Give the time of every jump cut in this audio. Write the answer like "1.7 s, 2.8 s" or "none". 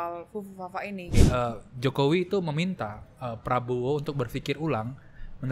1.1 s